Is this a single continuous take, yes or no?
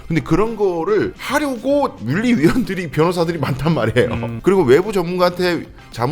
no